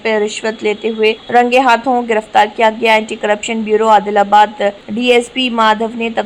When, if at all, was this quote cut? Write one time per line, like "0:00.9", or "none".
0:01.2